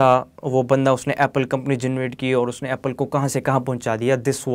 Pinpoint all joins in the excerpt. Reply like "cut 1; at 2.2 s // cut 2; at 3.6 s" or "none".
none